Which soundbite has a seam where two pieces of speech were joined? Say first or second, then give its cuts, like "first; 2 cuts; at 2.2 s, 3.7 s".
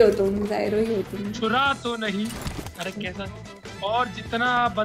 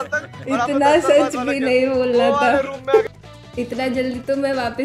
second; 1 cut; at 3.1 s